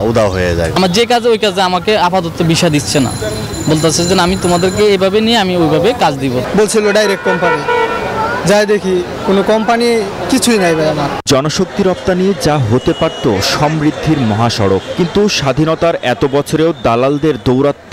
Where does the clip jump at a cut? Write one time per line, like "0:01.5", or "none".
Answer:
0:11.2